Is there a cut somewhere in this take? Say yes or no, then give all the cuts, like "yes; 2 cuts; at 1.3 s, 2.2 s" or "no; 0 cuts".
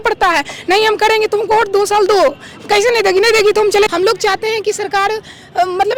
yes; 1 cut; at 3.9 s